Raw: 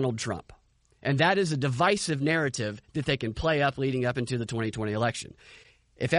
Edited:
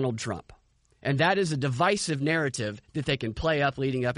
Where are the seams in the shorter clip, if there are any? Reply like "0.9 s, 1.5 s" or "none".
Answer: none